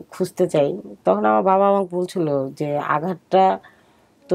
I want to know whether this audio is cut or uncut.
uncut